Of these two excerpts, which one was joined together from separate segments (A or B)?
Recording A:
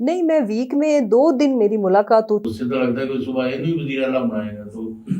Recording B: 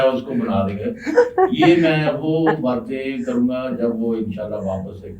A